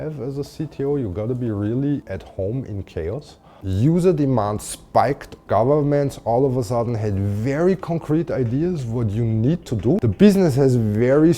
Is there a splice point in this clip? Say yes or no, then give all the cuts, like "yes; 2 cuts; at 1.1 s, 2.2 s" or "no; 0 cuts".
yes; 3 cuts; at 3.5 s, 5.4 s, 10.0 s